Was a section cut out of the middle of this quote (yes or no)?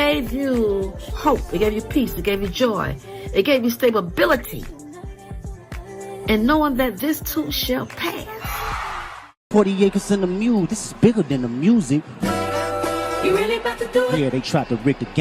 yes